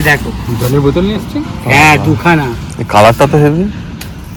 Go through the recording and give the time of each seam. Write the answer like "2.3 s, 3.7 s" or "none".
none